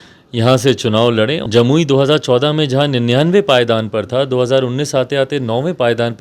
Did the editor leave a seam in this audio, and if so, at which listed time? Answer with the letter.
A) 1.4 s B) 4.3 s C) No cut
A